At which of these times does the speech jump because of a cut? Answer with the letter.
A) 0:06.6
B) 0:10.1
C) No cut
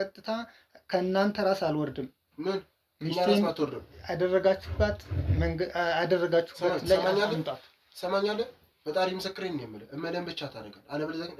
C